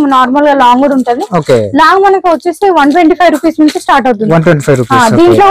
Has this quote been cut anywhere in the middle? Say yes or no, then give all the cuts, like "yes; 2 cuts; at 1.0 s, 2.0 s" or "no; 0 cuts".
no; 0 cuts